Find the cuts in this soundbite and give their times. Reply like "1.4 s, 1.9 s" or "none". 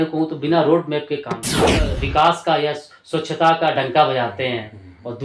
1.7 s